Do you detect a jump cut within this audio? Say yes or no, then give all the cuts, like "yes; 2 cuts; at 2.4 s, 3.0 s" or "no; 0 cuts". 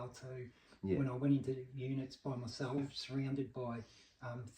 yes; 1 cut; at 2.8 s